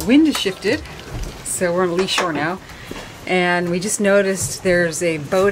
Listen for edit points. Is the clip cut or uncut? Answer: uncut